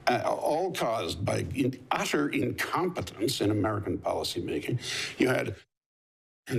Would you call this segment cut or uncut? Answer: uncut